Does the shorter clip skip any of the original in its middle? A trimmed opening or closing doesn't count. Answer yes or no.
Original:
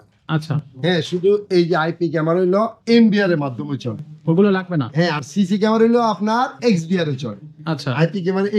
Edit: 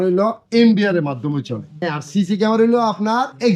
yes